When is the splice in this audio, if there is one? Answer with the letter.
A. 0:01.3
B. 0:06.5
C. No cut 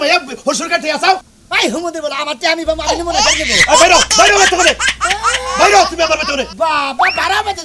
C